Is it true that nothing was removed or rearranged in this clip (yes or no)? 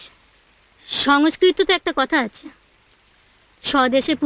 yes